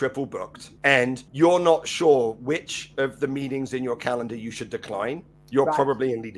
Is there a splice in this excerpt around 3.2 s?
no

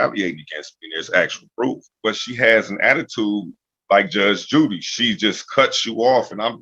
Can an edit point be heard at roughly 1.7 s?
yes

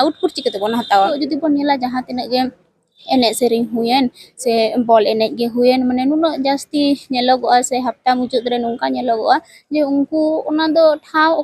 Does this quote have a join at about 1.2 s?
yes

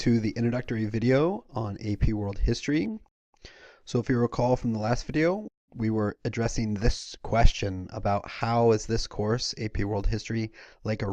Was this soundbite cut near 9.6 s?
yes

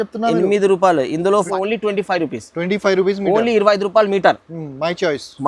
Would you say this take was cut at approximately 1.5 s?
yes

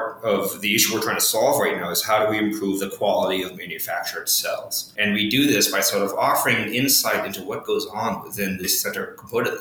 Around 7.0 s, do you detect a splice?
no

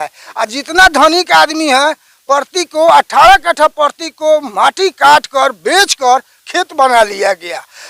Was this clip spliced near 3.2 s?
no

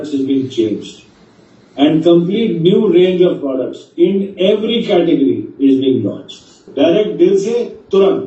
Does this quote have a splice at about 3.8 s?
no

